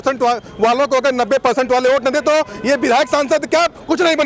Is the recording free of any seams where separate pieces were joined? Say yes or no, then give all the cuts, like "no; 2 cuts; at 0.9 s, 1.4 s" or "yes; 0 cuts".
yes; 0 cuts